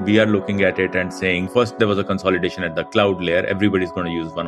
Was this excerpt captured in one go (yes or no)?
no